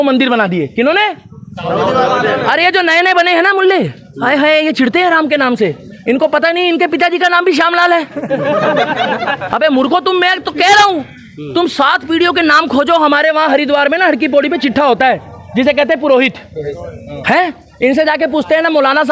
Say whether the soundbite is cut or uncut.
uncut